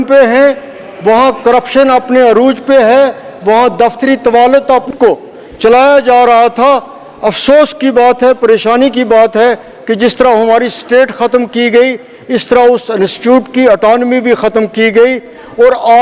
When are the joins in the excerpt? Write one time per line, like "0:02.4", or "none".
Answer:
0:04.9